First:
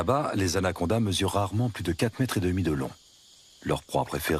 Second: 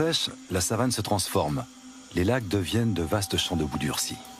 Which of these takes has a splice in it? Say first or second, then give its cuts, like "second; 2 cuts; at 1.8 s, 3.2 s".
first; 1 cut; at 2.0 s